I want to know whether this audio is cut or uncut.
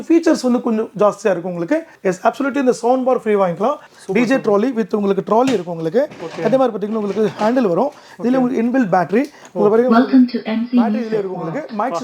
cut